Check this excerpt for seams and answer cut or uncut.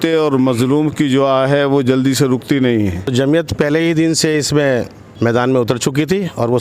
cut